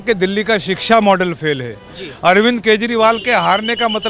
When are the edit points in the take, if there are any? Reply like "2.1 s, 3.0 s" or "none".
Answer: none